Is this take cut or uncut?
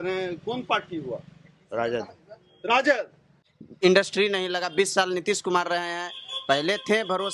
cut